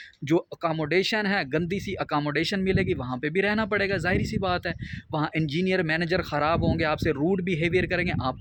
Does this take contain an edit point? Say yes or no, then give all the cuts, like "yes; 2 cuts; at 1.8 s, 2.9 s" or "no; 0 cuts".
no; 0 cuts